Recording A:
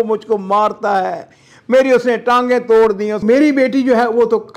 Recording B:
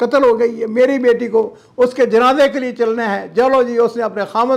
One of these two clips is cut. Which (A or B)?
A